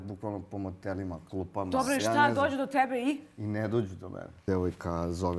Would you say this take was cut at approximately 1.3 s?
no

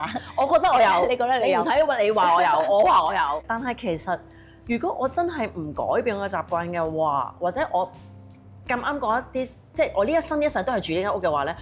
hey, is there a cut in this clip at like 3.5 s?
yes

